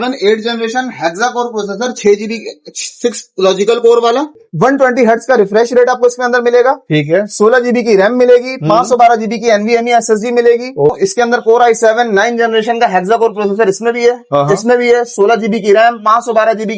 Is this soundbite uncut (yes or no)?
no